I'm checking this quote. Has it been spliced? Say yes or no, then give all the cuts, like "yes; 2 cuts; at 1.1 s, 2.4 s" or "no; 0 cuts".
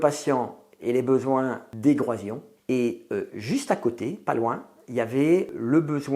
yes; 1 cut; at 1.7 s